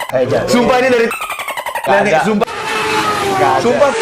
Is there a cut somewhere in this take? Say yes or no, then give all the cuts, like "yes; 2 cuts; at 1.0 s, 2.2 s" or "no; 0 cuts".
no; 0 cuts